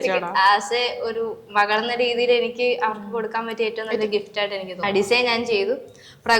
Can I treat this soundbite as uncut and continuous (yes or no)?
no